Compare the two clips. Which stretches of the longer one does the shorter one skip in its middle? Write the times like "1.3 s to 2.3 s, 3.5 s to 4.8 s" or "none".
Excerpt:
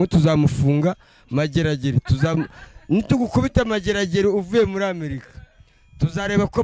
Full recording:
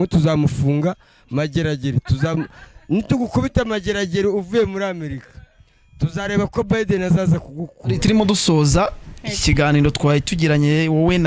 none